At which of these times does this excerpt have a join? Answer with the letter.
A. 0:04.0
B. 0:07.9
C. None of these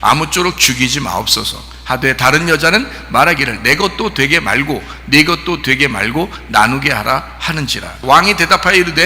B